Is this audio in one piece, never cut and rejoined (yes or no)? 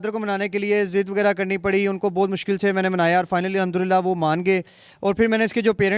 yes